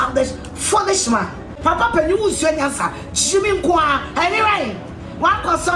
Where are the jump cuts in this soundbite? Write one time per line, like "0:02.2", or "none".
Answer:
0:01.4

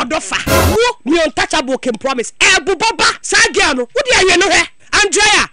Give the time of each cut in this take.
0:03.2

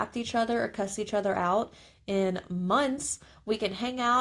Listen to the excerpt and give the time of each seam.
none

